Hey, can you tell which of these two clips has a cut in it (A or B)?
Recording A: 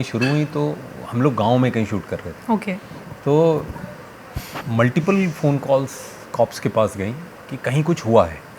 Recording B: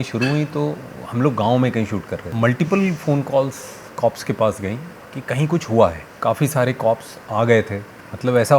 B